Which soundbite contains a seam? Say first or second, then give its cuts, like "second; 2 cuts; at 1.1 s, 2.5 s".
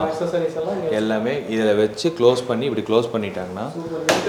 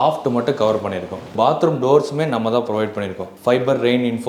second; 2 cuts; at 1.3 s, 3.3 s